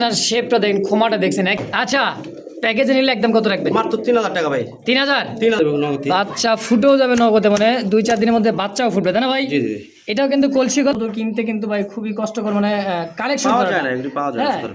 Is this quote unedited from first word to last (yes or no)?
no